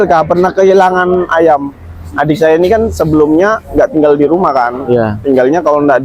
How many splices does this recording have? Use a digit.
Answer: 0